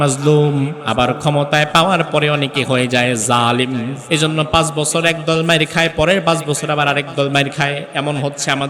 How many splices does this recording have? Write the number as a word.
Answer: one